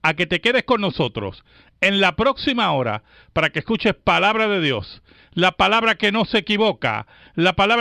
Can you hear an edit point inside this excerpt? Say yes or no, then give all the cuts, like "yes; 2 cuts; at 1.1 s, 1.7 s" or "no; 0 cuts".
no; 0 cuts